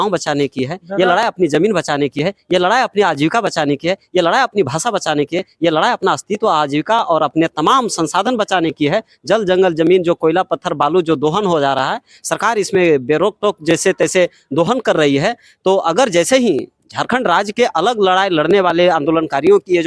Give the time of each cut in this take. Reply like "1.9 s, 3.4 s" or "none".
none

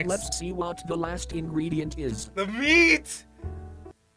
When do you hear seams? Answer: none

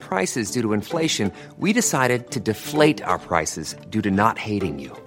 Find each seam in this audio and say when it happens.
none

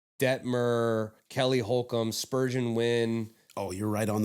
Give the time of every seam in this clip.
none

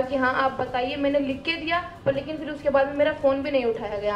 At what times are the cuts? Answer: none

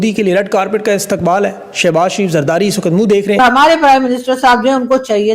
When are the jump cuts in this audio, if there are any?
3.4 s

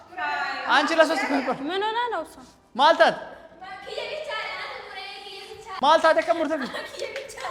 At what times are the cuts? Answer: none

